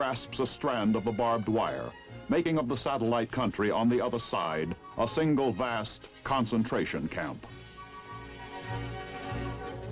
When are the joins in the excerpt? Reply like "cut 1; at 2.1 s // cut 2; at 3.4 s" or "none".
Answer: cut 1; at 2.2 s